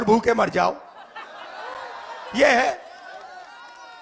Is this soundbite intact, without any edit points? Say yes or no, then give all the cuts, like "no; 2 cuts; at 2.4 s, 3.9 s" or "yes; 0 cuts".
yes; 0 cuts